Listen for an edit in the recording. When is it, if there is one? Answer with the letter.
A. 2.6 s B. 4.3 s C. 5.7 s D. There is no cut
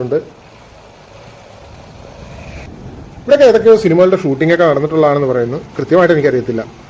A